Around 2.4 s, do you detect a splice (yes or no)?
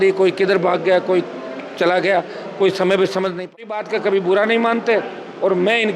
no